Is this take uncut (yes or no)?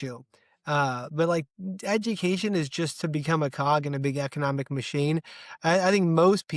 yes